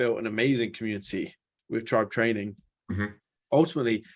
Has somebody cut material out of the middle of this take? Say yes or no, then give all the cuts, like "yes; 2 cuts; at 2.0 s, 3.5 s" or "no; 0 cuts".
yes; 1 cut; at 1.5 s